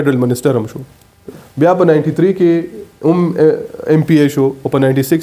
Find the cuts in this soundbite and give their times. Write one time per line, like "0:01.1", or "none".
0:01.3